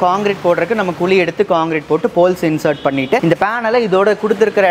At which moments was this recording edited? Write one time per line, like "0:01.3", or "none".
0:03.2